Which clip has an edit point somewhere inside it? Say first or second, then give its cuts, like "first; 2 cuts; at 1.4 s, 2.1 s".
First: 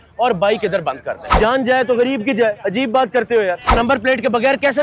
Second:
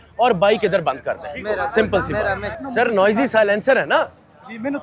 first; 2 cuts; at 1.4 s, 3.7 s